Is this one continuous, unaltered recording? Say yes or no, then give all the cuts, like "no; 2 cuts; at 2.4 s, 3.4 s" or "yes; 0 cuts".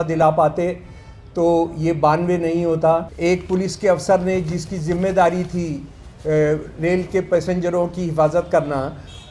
no; 1 cut; at 3.1 s